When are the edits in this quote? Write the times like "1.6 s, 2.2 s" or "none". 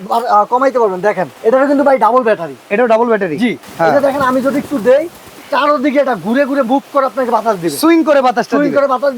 1.3 s, 3.6 s